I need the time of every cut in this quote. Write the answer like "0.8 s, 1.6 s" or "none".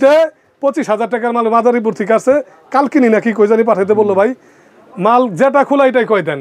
none